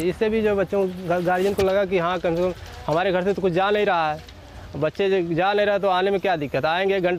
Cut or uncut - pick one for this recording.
uncut